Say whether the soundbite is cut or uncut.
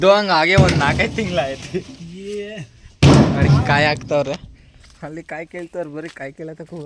uncut